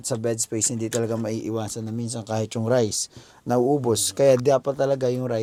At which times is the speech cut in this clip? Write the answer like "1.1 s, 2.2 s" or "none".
none

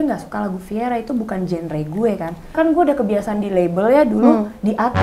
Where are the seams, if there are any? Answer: 2.5 s

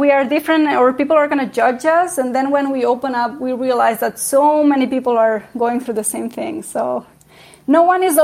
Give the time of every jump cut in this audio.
none

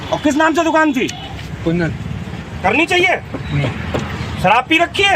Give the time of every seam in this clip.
3.8 s

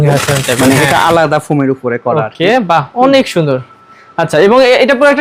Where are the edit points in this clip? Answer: none

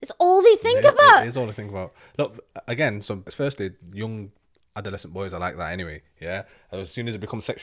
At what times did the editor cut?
none

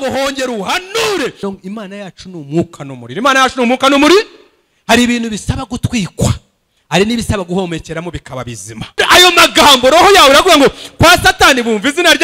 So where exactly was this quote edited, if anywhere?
1.4 s, 9.0 s

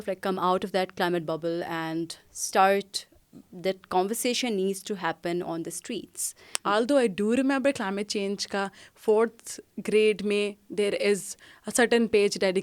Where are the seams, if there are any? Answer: 6.5 s

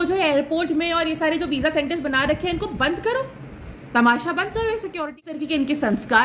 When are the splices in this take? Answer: 5.3 s

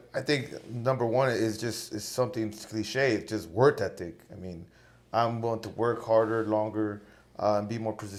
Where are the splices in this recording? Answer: none

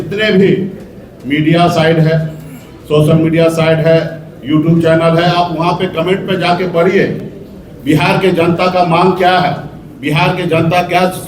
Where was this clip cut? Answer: none

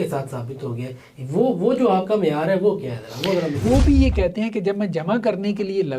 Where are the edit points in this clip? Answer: 3.6 s

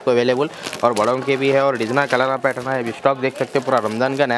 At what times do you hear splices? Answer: none

